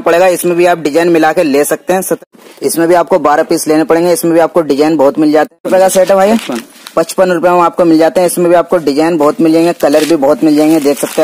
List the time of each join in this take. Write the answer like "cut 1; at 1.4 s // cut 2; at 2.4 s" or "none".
cut 1; at 2.2 s // cut 2; at 5.6 s